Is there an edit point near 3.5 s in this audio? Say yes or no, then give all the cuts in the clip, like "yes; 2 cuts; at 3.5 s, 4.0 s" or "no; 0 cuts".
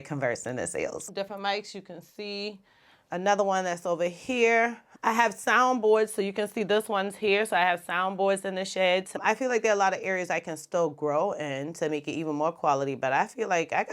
no; 2 cuts; at 1.1 s, 9.1 s